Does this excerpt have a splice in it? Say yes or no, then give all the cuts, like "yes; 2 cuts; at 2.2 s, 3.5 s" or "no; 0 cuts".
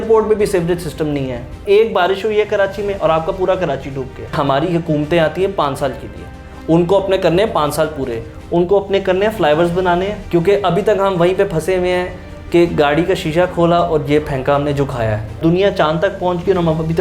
yes; 4 cuts; at 1.6 s, 4.3 s, 10.2 s, 15.4 s